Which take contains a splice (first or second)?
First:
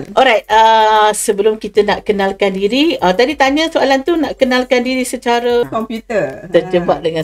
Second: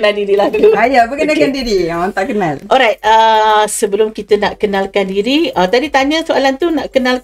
first